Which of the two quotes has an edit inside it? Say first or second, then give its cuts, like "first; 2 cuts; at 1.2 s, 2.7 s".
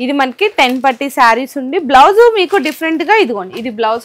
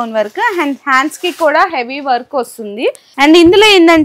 second; 1 cut; at 3.1 s